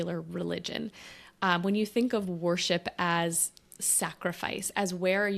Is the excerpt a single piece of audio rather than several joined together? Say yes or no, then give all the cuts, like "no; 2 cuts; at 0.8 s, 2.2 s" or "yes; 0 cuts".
yes; 0 cuts